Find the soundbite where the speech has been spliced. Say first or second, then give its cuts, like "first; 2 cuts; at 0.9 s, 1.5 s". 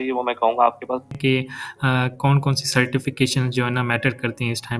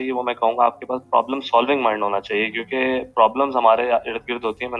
first; 1 cut; at 1.1 s